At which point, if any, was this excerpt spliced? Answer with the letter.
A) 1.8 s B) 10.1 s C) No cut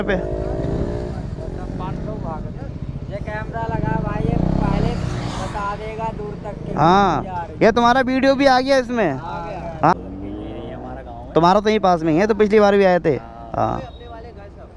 C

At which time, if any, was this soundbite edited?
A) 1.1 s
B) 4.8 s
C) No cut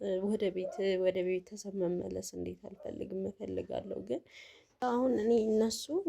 B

